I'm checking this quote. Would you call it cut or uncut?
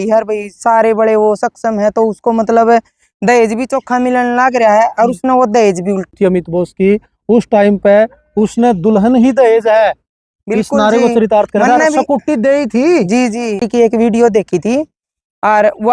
cut